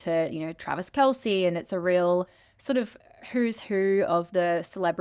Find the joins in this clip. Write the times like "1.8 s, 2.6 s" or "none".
none

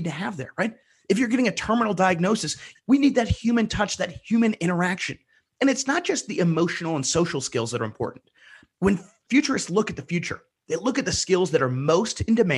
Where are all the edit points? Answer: 9.2 s

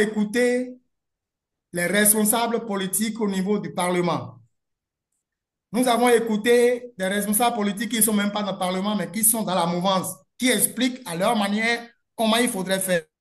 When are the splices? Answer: none

